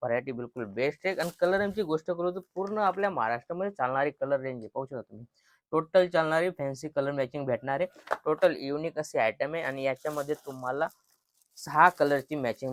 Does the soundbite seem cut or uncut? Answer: uncut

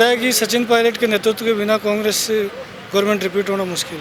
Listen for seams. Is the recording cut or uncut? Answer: uncut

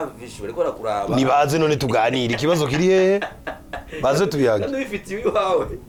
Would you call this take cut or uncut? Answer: uncut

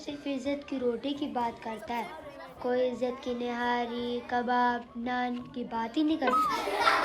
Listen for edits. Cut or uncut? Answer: uncut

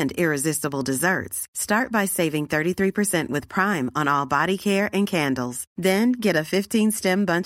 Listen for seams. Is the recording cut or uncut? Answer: uncut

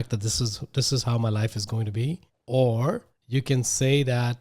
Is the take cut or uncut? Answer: cut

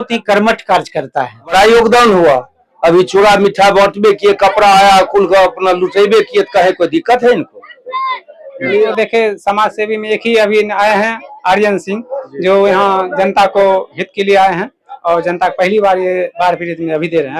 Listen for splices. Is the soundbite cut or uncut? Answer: cut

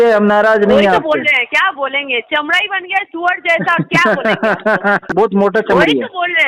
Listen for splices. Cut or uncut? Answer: cut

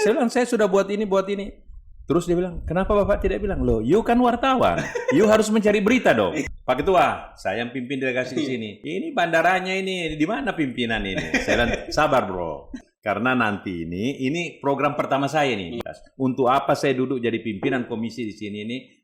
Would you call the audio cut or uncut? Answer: cut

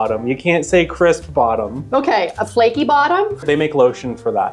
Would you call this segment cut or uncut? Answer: cut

